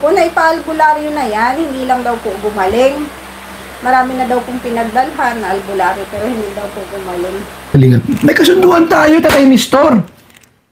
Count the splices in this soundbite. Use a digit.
1